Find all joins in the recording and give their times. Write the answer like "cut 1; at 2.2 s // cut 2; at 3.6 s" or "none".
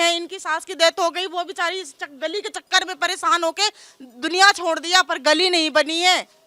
none